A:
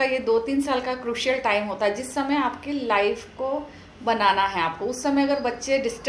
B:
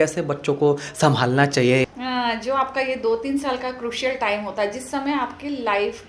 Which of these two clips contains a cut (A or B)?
B